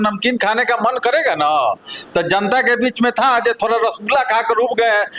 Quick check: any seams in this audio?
no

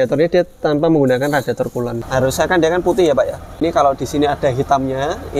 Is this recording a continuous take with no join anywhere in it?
no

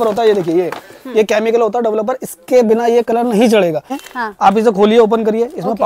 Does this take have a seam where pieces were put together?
yes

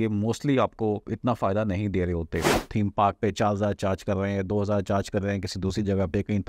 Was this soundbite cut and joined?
yes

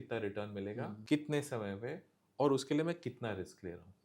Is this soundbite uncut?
no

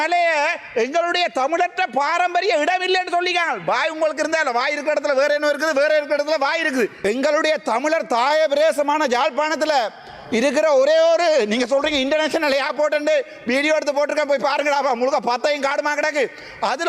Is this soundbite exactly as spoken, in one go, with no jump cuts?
no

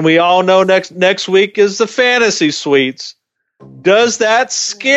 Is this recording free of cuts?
yes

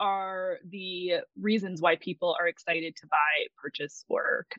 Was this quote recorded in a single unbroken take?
yes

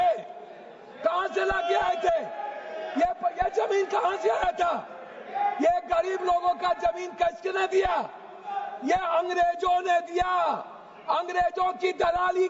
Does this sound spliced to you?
no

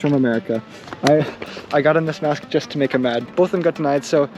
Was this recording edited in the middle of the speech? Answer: yes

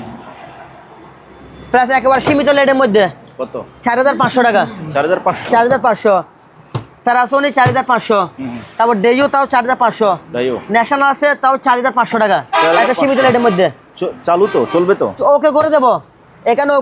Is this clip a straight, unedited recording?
yes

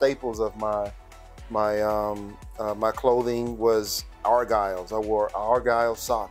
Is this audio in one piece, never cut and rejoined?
yes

